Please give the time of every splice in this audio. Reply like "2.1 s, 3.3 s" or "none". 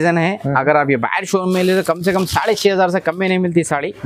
none

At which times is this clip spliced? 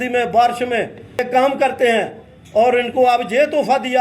1.1 s

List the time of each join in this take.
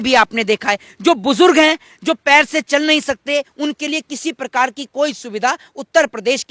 none

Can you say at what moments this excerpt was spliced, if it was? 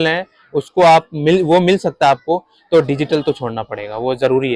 none

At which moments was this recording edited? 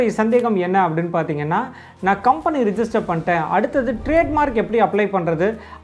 none

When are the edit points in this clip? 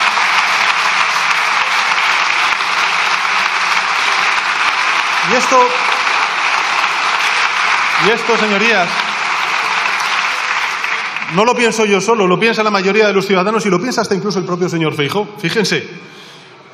none

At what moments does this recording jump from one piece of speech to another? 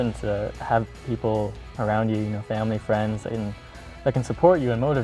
none

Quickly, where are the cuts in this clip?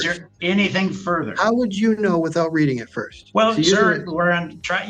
3.2 s

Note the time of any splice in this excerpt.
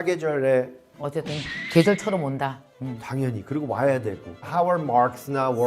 4.5 s

